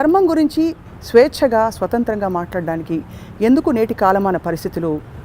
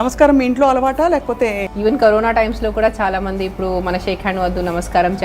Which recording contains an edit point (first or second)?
second